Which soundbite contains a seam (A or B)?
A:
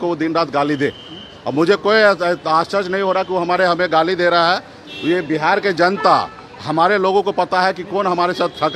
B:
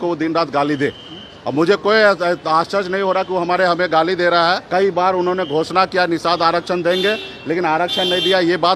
B